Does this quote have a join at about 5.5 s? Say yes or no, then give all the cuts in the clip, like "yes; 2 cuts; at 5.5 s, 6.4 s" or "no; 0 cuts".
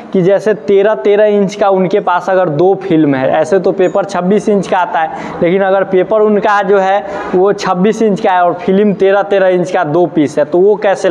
no; 0 cuts